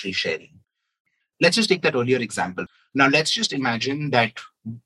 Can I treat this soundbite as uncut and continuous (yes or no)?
no